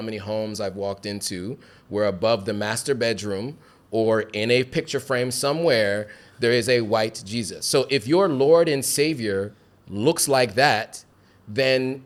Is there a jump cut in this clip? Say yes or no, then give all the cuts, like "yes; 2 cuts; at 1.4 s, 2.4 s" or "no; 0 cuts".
no; 0 cuts